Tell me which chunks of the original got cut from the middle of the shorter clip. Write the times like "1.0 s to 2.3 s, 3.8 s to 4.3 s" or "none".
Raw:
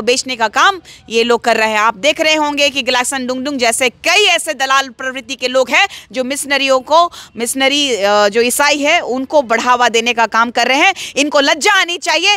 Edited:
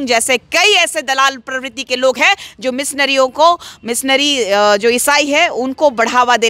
none